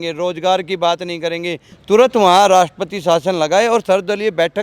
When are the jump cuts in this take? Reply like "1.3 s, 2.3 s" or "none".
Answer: 1.7 s